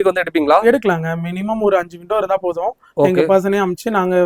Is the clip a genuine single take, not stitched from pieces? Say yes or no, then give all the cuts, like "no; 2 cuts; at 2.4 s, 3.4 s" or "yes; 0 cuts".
yes; 0 cuts